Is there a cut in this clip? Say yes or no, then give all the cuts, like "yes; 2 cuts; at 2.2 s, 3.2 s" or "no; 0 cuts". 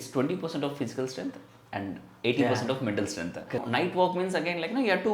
yes; 1 cut; at 3.6 s